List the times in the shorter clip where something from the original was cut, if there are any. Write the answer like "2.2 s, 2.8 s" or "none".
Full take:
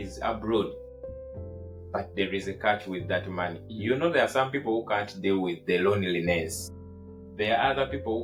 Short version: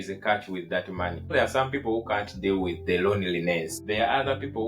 1.3 s, 3.7 s